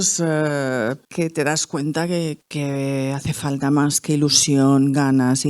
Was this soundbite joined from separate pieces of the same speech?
yes; 2 cuts; at 1.0 s, 2.5 s

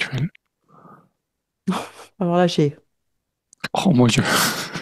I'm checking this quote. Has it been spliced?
no; 0 cuts

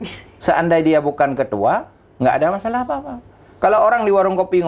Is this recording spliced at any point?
no; 0 cuts

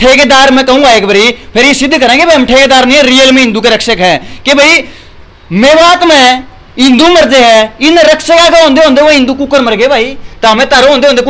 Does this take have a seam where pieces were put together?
no; 0 cuts

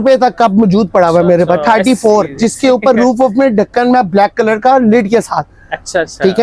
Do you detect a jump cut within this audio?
no; 0 cuts

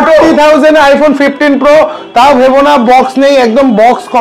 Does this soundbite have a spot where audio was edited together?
no; 0 cuts

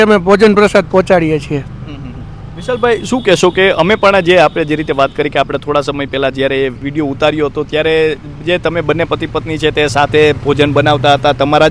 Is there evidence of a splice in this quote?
no; 0 cuts

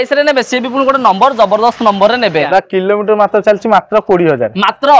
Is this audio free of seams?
no; 1 cut; at 2.5 s

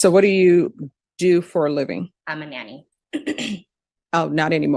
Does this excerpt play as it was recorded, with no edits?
no; 1 cut; at 2.2 s

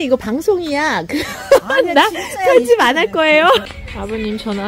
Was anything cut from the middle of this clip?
yes; 1 cut; at 3.6 s

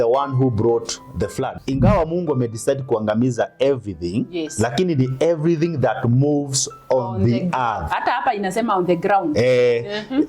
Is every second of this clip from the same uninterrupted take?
no; 1 cut; at 1.5 s

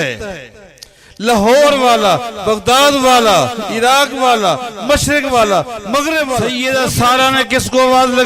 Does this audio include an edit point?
yes; 1 cut; at 6.5 s

